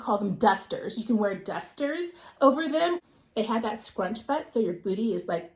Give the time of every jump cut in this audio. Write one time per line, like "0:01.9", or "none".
0:03.0

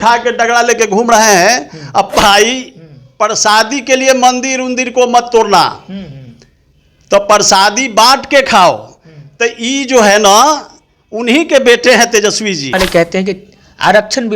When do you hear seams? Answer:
0:02.1
0:12.7

